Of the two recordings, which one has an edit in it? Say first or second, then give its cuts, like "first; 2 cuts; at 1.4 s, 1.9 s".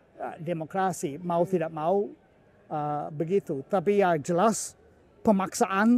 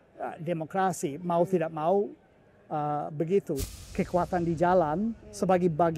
second; 1 cut; at 3.6 s